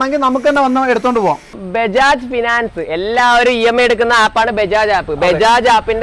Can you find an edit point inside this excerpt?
yes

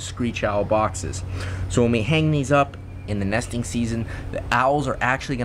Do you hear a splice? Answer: no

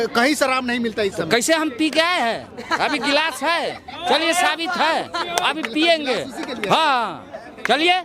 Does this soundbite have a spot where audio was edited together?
no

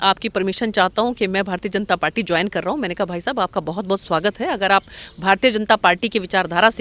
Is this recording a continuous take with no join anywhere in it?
yes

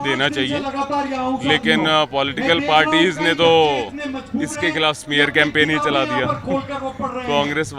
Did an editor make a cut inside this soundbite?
no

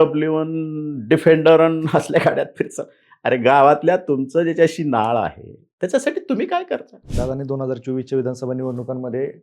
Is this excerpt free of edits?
no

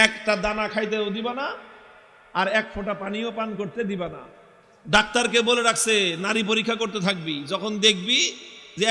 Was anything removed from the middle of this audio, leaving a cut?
no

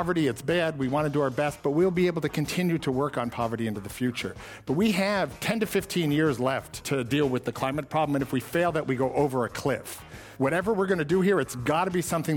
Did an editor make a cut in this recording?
yes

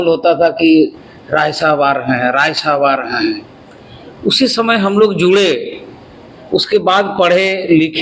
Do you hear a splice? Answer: no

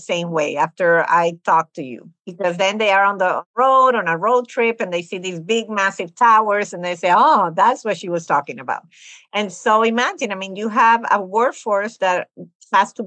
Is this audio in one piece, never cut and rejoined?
no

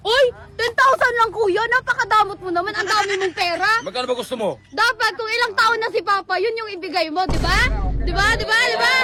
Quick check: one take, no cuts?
yes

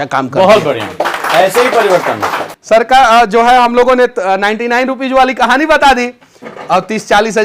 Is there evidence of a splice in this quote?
yes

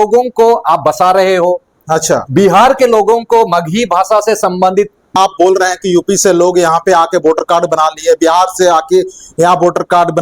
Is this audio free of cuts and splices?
no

